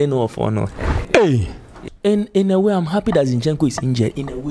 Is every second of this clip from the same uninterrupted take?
no; 1 cut; at 1.9 s

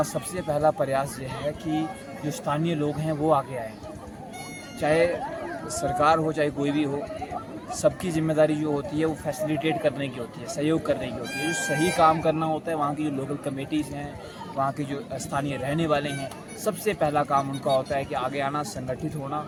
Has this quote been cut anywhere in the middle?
no; 0 cuts

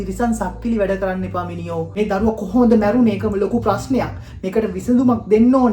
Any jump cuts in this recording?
yes; 1 cut; at 1.9 s

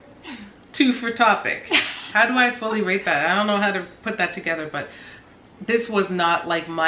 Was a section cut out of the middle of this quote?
no; 0 cuts

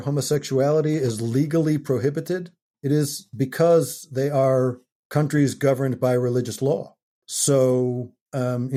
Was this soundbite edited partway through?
no; 0 cuts

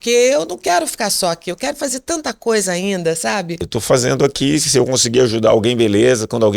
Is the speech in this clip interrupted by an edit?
yes; 1 cut; at 3.7 s

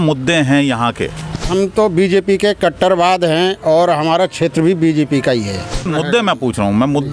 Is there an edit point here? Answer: yes; 2 cuts; at 1.5 s, 5.9 s

